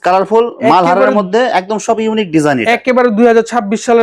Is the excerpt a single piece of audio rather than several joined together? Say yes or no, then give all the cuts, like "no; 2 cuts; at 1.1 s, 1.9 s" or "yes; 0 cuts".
yes; 0 cuts